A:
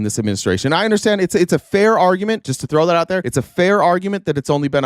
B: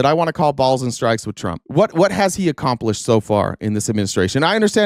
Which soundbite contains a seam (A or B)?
A